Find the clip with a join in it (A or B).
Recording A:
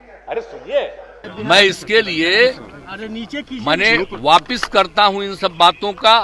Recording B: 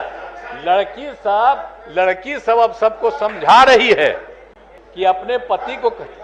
A